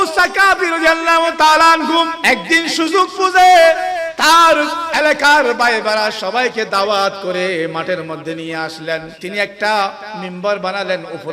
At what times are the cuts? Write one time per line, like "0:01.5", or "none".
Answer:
0:02.2
0:09.1